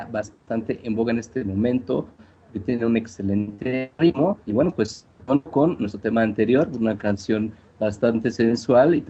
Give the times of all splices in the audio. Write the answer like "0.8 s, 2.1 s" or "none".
7.6 s